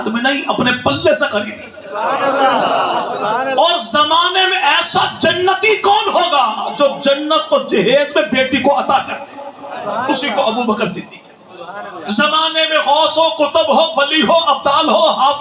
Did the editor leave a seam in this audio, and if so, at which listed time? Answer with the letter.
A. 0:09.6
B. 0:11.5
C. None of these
C